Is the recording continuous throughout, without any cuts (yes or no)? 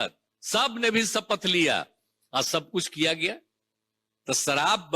yes